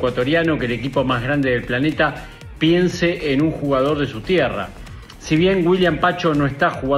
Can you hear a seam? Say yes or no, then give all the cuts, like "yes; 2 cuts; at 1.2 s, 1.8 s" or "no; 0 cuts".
no; 0 cuts